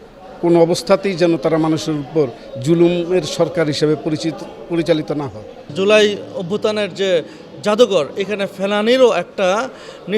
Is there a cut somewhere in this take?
yes; 1 cut; at 5.7 s

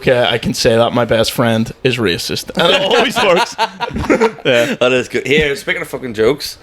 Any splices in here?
no; 0 cuts

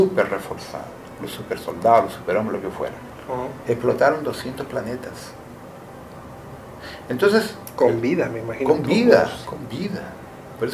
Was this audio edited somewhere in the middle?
yes; 1 cut; at 3.0 s

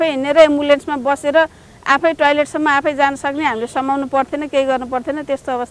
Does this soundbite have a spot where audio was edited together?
no; 0 cuts

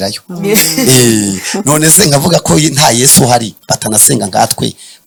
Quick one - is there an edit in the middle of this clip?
no; 0 cuts

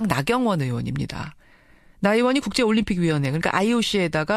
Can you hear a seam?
no; 0 cuts

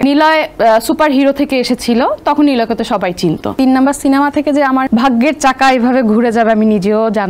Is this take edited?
yes; 2 cuts; at 3.5 s, 4.9 s

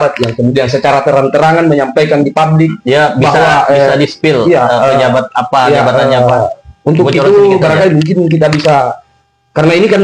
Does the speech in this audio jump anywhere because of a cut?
no; 0 cuts

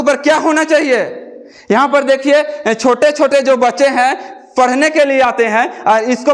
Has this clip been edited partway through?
no; 0 cuts

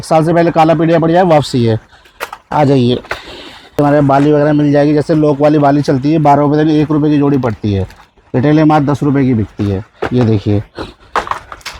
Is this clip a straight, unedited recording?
yes; 0 cuts

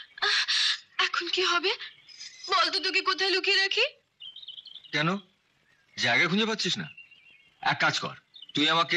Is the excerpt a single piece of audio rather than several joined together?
yes; 0 cuts

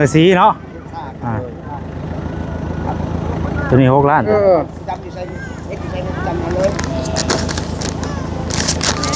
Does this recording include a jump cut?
no; 0 cuts

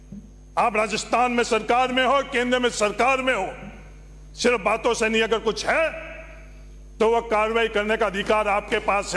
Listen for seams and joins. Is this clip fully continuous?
yes; 0 cuts

